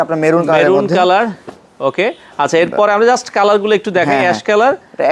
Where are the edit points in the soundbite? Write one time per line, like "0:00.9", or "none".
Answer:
none